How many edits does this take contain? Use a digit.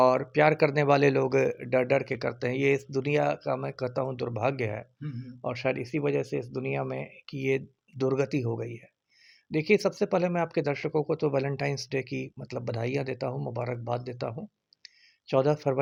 0